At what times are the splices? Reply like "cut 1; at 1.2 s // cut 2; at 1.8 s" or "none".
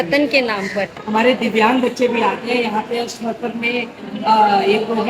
cut 1; at 1.0 s